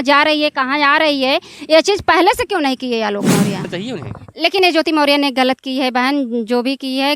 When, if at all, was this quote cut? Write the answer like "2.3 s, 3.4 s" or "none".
3.7 s